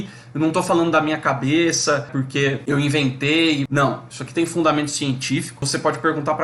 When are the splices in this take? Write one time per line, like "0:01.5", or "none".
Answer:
0:02.2
0:03.7
0:05.7